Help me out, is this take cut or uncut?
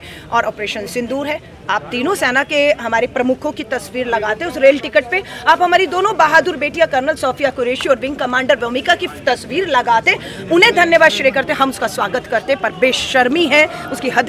uncut